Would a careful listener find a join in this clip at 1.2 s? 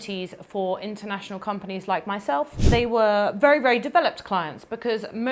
no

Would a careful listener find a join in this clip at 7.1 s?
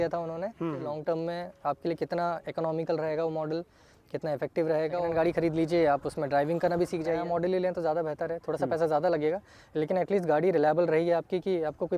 yes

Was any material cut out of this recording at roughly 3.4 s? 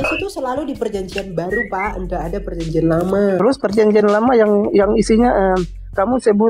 yes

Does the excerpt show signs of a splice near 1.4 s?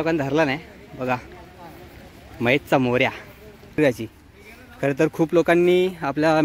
no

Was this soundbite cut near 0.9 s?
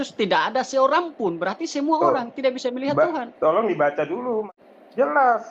no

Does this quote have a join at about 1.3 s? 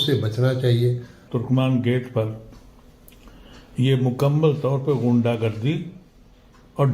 yes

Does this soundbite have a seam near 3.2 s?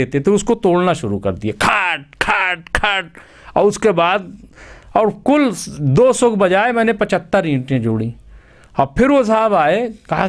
no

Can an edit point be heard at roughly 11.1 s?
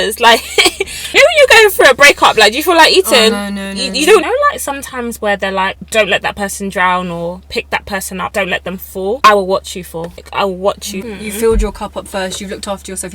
yes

